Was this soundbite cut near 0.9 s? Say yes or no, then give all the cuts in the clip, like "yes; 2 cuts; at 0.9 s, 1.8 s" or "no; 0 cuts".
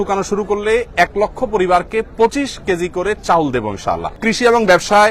no; 1 cut; at 4.2 s